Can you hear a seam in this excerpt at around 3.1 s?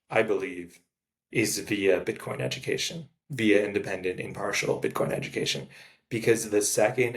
no; 0 cuts

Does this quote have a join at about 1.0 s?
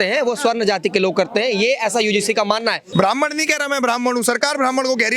no; 1 cut; at 2.8 s

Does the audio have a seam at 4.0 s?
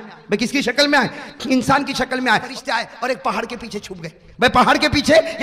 no; 1 cut; at 2.5 s

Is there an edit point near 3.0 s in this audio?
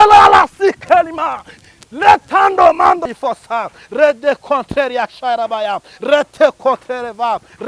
yes; 1 cut; at 3.0 s

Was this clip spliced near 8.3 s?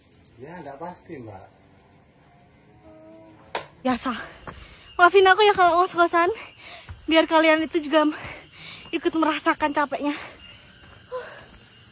no; 1 cut; at 3.9 s

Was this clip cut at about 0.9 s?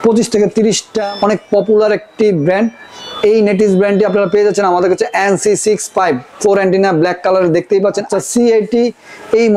yes; 2 cuts; at 0.9 s, 8.1 s

